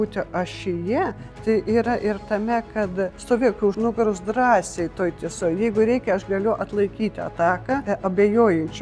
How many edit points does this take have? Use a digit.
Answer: 2